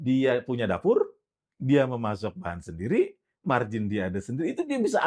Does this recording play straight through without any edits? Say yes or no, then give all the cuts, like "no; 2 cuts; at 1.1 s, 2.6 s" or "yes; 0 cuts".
yes; 0 cuts